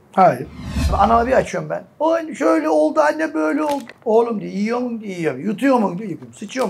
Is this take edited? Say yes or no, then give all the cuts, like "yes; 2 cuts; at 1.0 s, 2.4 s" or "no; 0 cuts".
yes; 1 cut; at 0.9 s